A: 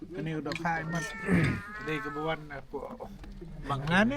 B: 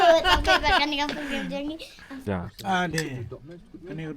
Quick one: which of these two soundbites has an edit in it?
B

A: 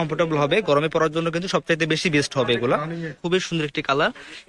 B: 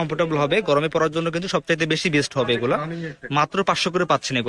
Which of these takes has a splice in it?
A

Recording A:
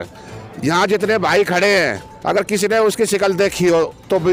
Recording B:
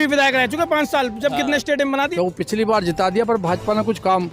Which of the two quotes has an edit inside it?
B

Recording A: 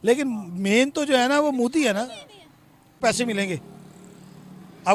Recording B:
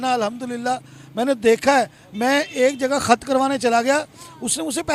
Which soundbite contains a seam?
A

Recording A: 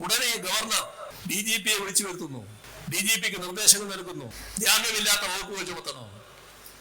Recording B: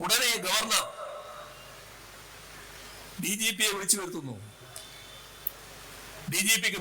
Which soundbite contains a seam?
A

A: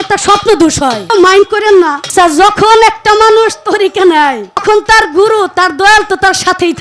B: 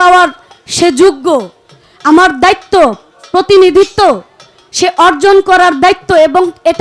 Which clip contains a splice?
A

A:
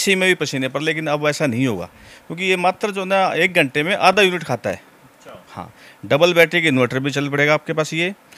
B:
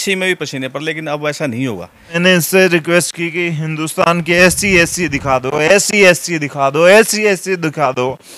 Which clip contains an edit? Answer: B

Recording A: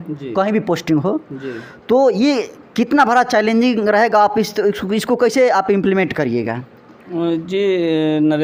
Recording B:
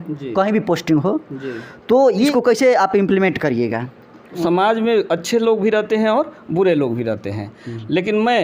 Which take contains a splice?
B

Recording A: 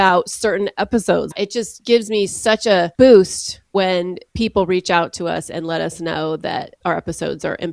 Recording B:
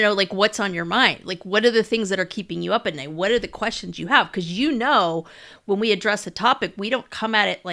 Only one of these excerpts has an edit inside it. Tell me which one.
A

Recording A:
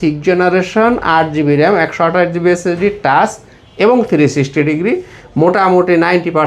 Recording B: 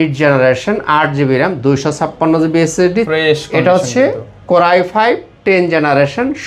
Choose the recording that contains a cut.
B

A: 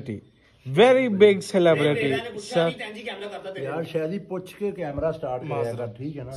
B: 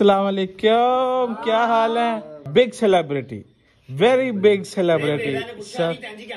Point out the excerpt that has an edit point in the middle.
B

